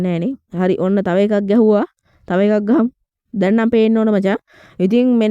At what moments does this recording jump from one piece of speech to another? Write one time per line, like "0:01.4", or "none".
none